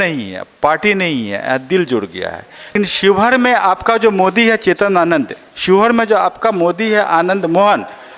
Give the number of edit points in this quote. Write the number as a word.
one